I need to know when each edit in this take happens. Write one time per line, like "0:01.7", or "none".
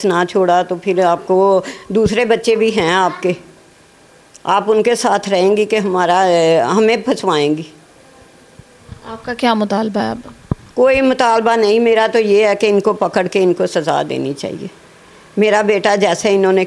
none